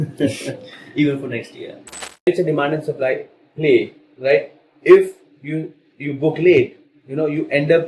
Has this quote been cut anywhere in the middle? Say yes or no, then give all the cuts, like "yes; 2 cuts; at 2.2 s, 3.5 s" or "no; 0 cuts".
yes; 1 cut; at 2.3 s